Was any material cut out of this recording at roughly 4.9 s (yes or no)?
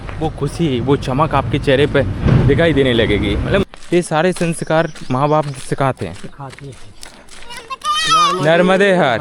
no